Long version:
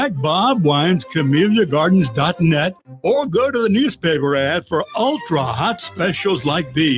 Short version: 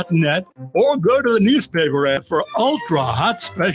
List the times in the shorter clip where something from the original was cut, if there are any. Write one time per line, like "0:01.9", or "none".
0:02.2

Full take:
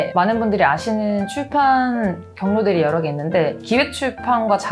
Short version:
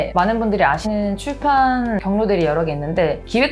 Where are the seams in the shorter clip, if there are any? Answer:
0:00.8
0:02.0

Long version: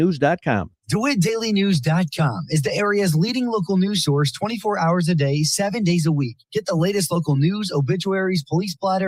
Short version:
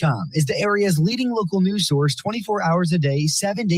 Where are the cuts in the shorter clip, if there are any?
none

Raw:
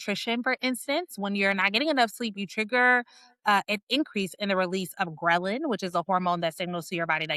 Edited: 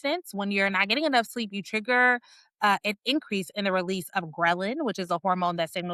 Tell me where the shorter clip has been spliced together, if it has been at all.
none

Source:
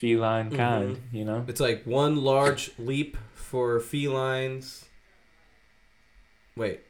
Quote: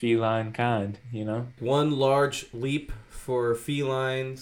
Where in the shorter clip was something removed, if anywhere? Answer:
0:01.5

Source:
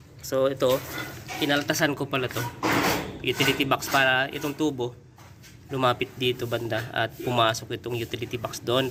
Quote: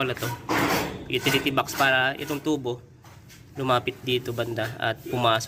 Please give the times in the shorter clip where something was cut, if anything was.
none

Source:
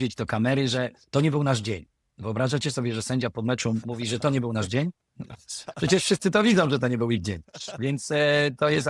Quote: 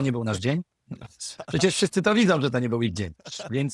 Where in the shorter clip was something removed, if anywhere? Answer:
none

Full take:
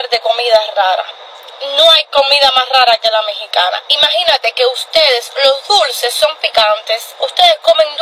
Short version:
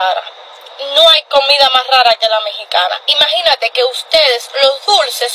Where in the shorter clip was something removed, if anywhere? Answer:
none

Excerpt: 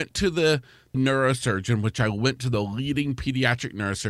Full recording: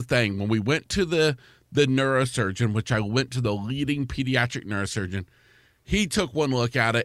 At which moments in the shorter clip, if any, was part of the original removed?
0:01.0

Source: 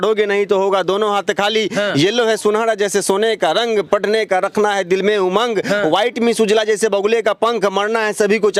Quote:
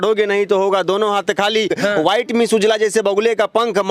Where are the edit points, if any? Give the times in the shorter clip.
0:01.7

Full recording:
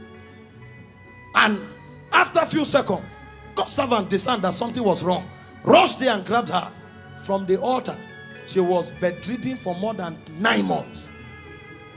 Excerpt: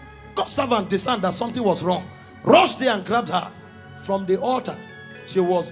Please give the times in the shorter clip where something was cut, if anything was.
none

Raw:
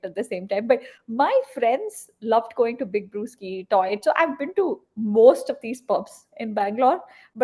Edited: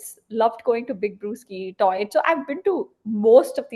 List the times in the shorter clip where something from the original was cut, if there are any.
none

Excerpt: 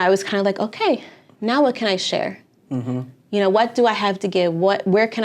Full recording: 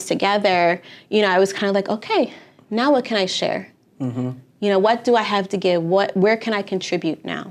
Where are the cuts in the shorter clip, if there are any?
none

